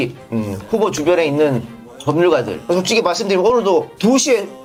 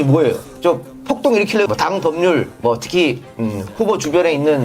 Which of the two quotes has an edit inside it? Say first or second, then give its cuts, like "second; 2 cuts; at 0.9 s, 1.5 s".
second; 1 cut; at 1.7 s